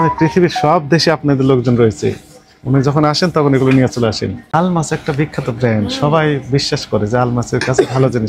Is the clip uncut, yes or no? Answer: no